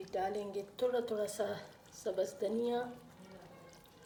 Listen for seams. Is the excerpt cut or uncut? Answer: uncut